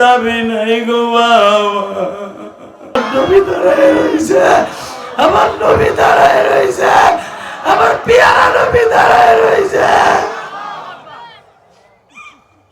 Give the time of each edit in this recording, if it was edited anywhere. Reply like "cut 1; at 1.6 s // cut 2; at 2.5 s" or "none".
cut 1; at 3.0 s